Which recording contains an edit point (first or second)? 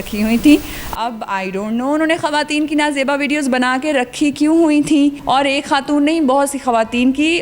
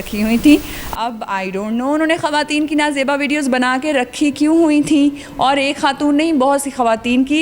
first